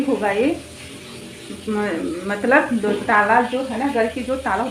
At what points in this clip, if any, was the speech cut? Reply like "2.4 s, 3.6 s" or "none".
none